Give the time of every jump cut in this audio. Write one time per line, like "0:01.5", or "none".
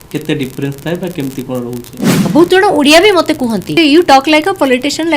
0:02.3
0:03.8

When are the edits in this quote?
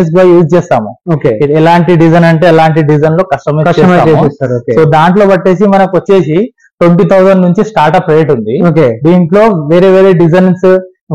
none

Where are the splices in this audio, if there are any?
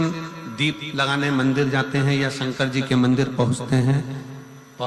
none

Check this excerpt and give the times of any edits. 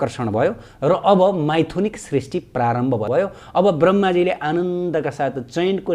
0:03.1

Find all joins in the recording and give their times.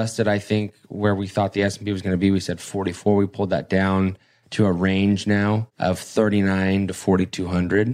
0:05.7

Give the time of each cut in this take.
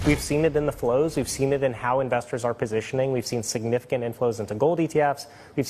none

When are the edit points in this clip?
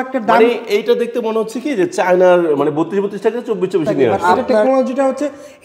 0:04.2

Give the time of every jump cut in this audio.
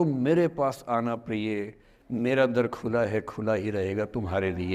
none

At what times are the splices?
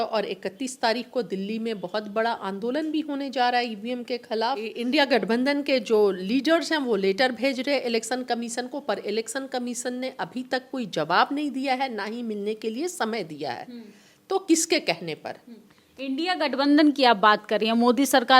0:04.8

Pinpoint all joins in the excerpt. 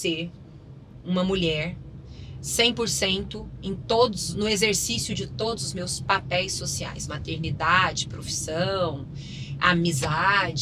none

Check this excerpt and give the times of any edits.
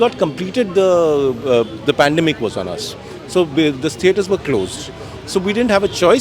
none

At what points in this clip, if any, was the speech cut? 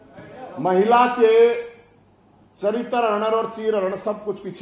none

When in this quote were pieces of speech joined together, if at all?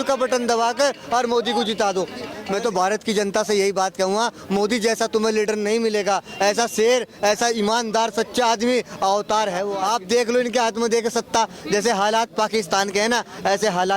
0:02.4
0:09.7

